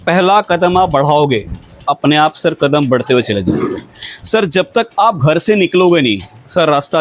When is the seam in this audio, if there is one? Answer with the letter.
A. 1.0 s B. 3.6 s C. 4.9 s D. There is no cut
D